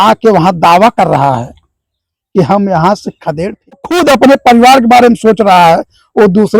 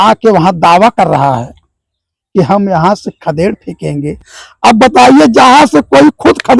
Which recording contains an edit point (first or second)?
first